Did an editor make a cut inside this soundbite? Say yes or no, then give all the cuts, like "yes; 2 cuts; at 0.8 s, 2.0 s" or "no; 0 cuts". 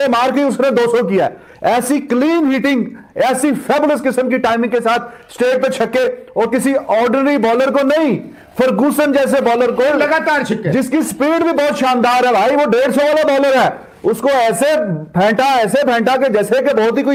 no; 0 cuts